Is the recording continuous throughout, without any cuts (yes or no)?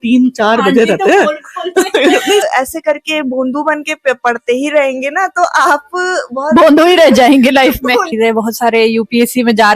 no